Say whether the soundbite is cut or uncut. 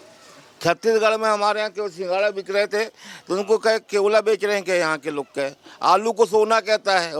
uncut